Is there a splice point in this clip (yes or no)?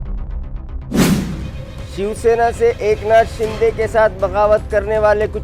no